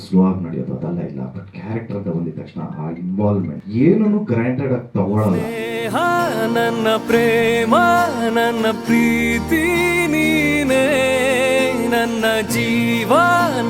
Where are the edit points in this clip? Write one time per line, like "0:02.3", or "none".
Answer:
0:05.5